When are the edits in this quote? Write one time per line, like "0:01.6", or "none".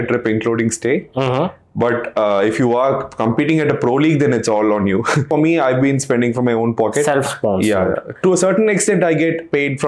0:05.3